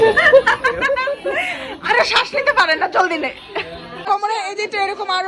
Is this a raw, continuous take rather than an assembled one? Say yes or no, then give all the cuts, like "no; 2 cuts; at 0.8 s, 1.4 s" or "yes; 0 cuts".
yes; 0 cuts